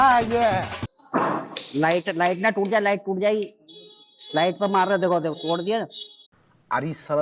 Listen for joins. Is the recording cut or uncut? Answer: uncut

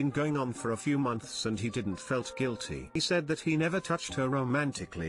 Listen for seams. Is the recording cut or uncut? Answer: cut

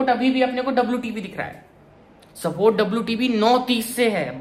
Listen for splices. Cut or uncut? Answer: uncut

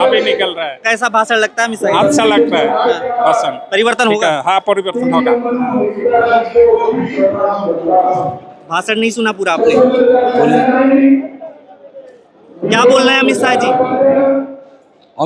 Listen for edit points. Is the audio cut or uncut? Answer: uncut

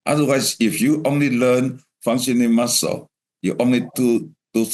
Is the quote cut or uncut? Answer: uncut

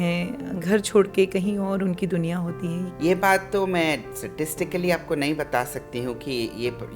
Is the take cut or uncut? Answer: cut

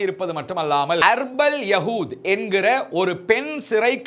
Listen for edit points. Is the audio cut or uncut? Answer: cut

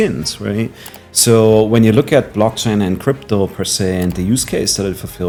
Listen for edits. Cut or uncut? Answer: uncut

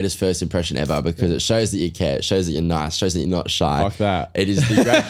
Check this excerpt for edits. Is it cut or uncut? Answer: uncut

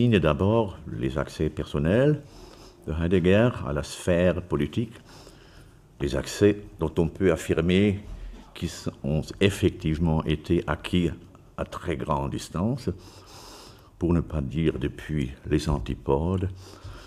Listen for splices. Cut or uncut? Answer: cut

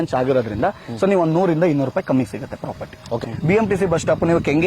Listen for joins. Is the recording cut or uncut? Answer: cut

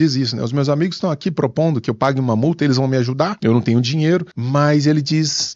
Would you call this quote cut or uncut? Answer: cut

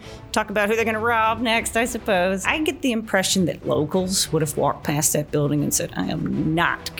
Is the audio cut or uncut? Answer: cut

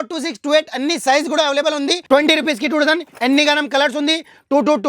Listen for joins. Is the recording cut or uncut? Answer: cut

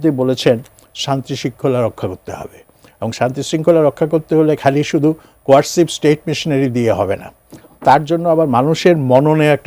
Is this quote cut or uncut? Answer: uncut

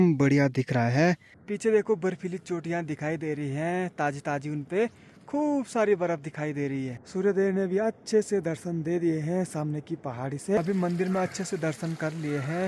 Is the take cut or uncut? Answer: cut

